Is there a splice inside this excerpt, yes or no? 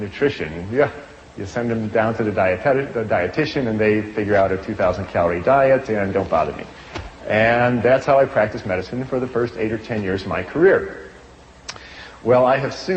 no